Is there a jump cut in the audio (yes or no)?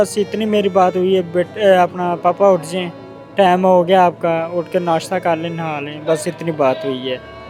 no